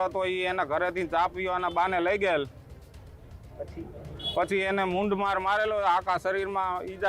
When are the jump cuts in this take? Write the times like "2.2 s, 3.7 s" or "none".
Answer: none